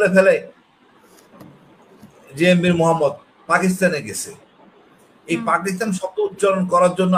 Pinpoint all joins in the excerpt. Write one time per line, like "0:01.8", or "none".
none